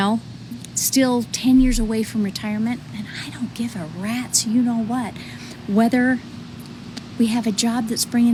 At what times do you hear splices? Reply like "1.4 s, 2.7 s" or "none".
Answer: none